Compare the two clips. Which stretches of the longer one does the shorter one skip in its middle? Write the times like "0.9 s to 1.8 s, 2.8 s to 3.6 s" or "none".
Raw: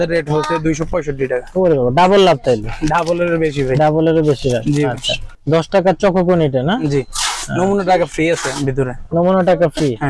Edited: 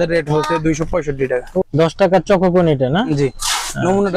1.6 s to 5.3 s